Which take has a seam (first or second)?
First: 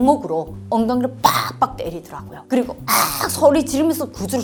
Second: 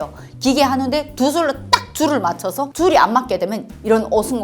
second